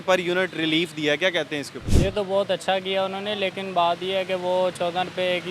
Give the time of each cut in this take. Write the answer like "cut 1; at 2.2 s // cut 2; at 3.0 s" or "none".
cut 1; at 1.8 s